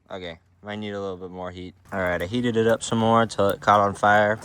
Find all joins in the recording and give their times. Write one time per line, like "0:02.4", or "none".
0:01.8